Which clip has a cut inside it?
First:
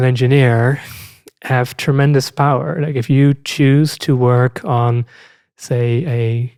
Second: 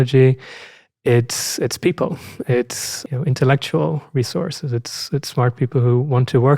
second; 1 cut; at 3.0 s

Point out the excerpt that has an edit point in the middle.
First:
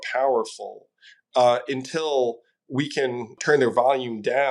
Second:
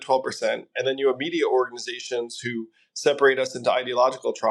first; 1 cut; at 3.4 s

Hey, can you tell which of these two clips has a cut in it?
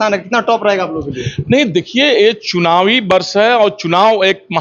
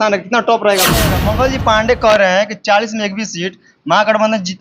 second; 1 cut; at 1.2 s

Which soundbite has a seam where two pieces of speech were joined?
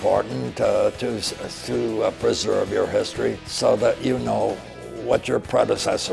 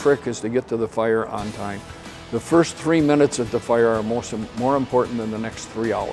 first; 2 cuts; at 3.5 s, 4.7 s

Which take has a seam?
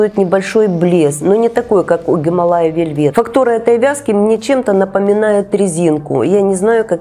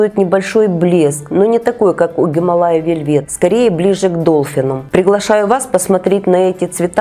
first; 2 cuts; at 1.2 s, 3.1 s

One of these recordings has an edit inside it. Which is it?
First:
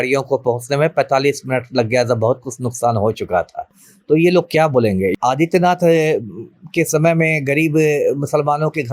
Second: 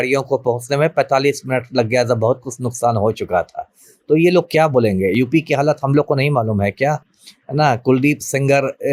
first; 1 cut; at 5.1 s

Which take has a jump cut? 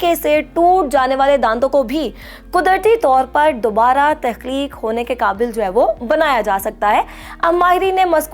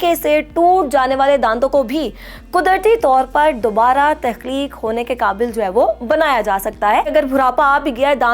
second; 1 cut; at 7.1 s

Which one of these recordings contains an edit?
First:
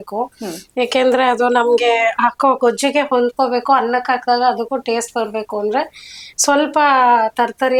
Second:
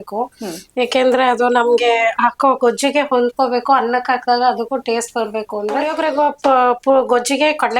second; 1 cut; at 5.9 s

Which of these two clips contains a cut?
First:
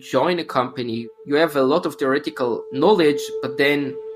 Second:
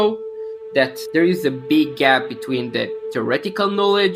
first; 1 cut; at 1.1 s

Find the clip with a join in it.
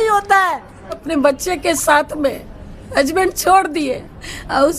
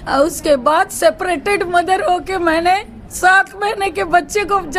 first; 1 cut; at 1.0 s

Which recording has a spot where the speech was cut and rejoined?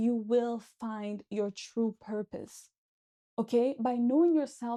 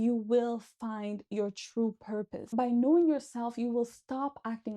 second; 1 cut; at 2.5 s

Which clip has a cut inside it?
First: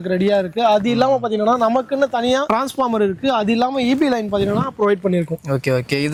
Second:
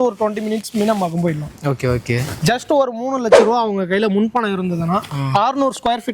second; 1 cut; at 2.4 s

